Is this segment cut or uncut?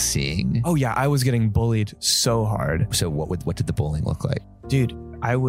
cut